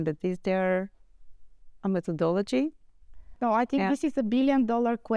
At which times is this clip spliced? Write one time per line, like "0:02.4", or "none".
0:03.4